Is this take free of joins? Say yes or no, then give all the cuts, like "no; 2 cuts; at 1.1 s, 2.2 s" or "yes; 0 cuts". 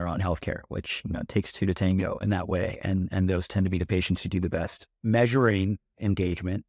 yes; 0 cuts